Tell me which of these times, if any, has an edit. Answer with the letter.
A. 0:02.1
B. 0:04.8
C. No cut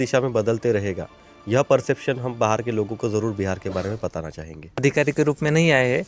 B